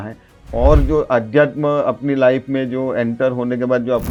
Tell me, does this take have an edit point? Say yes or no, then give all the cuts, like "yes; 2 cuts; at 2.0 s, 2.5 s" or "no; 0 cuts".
no; 0 cuts